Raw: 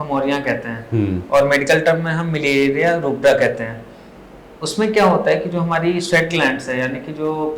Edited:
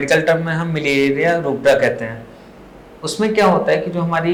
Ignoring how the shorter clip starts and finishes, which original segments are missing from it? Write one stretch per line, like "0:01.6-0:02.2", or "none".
none